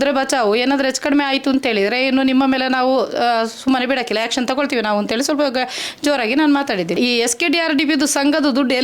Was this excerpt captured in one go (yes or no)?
no